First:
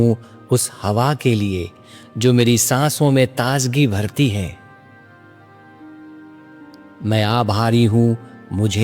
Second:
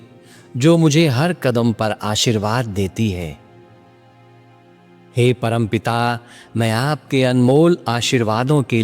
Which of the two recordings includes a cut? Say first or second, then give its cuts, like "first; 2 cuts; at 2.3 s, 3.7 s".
first; 2 cuts; at 4.6 s, 6.3 s